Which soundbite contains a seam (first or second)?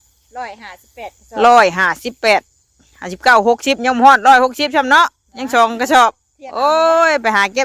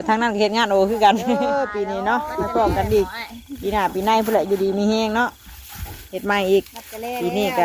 second